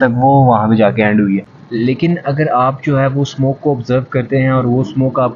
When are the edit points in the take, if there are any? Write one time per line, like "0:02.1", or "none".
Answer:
0:01.6

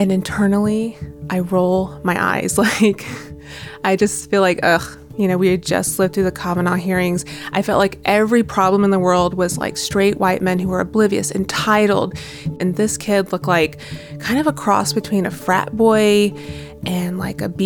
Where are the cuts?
0:04.9
0:12.6

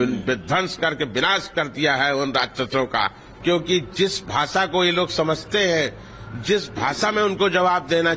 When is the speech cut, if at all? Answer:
0:03.2

